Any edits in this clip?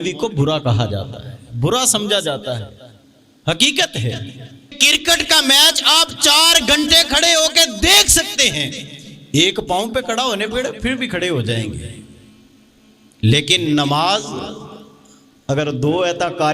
yes; 1 cut; at 4.8 s

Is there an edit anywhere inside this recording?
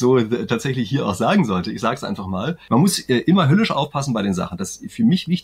yes; 1 cut; at 2.6 s

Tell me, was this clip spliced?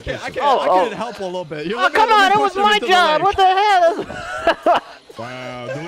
no; 0 cuts

